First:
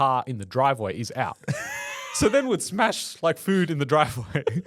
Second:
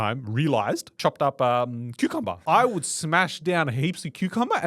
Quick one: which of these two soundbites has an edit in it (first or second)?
second